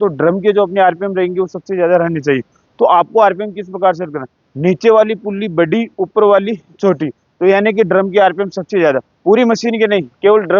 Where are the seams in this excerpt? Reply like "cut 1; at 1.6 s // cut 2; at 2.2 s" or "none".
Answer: none